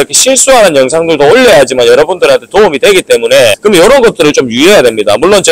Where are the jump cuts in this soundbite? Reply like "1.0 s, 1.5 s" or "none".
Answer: none

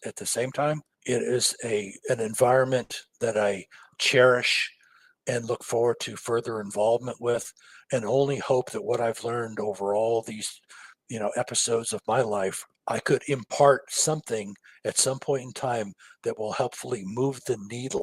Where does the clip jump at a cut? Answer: 0.9 s, 12.7 s

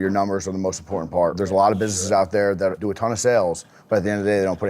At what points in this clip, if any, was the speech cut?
1.3 s, 2.8 s

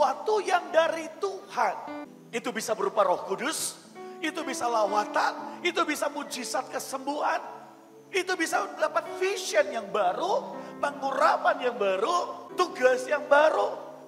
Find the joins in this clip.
2.1 s, 12.4 s

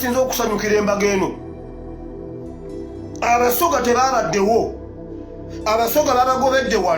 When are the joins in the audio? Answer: 1.3 s, 3.2 s

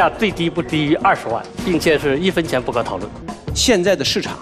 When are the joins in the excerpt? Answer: 3.2 s

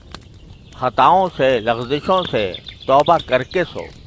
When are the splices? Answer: none

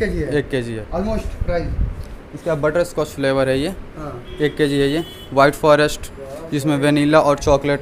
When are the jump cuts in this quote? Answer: none

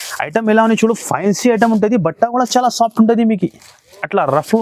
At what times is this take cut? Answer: none

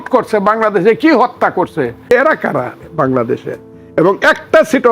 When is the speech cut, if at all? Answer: 2.1 s

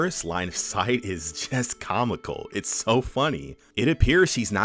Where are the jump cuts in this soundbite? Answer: none

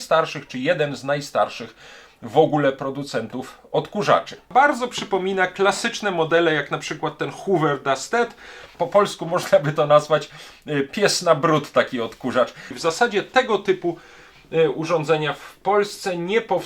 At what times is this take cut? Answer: 4.5 s, 8.7 s, 12.6 s

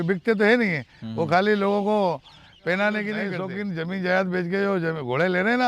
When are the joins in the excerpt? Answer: 3.4 s

